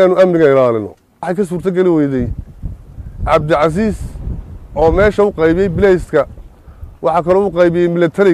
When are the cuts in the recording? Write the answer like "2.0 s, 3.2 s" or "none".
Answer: 1.3 s